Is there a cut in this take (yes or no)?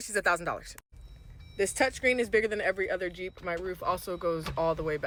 no